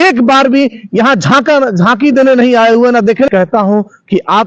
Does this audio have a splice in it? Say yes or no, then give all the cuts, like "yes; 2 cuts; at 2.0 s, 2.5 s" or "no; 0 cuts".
yes; 1 cut; at 3.3 s